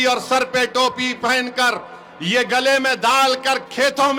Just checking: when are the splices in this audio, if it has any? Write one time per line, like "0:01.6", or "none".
none